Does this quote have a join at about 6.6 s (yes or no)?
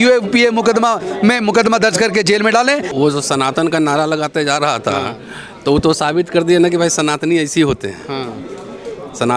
no